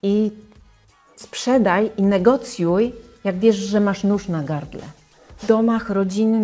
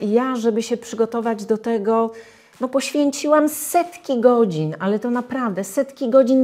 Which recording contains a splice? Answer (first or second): first